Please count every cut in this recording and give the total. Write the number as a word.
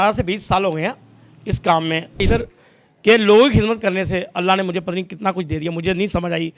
one